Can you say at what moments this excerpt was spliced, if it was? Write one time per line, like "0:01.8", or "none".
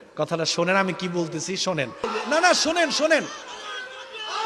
0:02.1